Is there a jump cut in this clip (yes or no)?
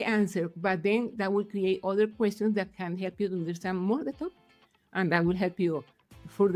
no